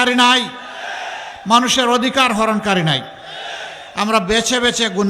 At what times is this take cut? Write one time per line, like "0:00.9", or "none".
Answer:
none

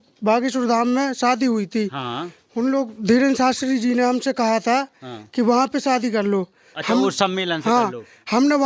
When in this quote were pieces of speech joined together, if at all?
none

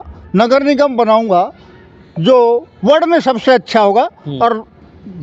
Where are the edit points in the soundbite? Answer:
none

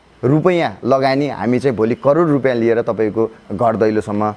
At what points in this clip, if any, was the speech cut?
0:03.4

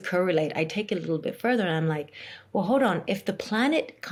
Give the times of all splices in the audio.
none

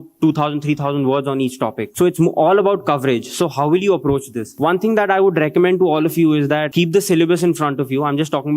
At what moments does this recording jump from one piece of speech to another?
0:01.8
0:04.4
0:06.7

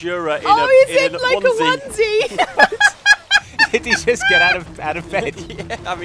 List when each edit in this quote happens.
none

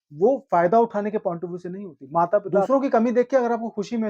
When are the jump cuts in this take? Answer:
0:02.7

